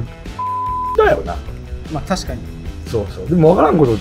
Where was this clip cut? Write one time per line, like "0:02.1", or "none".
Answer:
none